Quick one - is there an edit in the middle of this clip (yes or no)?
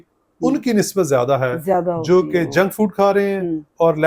no